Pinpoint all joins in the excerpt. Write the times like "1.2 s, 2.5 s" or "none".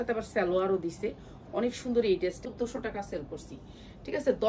2.5 s